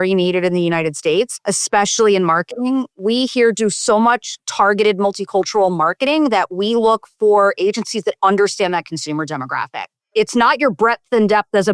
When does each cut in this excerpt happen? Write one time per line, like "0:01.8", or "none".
none